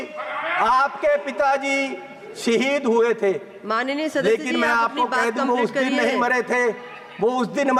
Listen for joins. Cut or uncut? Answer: uncut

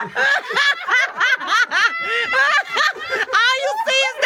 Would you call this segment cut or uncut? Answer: uncut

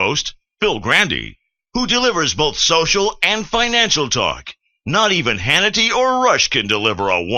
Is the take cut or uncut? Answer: uncut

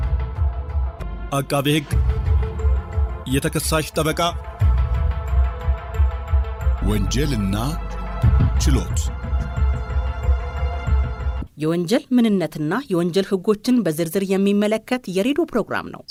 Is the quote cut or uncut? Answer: uncut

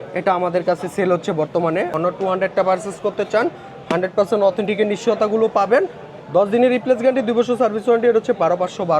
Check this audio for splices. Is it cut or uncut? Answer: cut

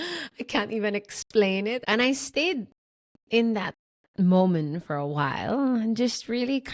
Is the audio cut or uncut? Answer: cut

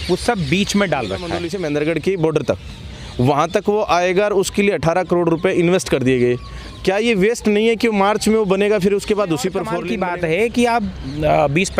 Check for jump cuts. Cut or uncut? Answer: cut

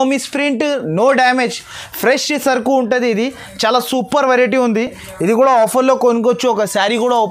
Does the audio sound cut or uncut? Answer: uncut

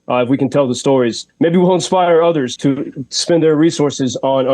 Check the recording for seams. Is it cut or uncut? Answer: cut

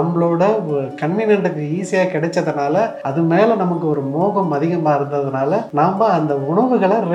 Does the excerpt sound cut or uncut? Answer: uncut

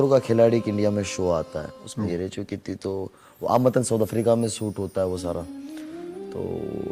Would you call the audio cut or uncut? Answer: uncut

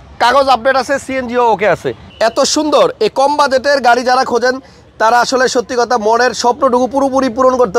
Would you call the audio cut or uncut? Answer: cut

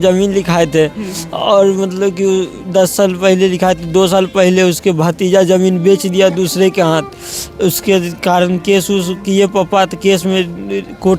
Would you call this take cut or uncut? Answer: uncut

